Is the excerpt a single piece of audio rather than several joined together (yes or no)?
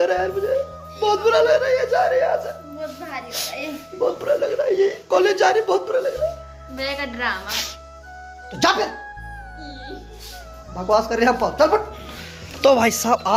yes